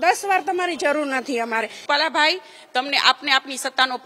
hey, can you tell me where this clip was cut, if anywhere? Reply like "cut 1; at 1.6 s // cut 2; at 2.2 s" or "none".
cut 1; at 1.8 s